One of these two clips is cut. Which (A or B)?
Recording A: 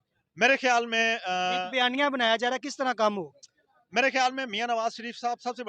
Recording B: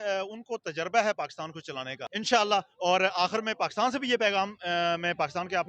B